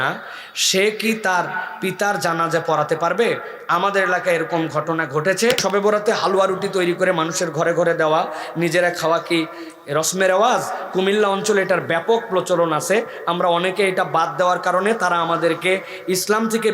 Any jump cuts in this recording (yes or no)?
yes